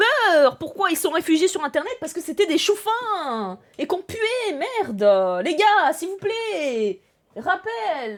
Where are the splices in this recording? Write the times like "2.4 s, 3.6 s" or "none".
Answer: none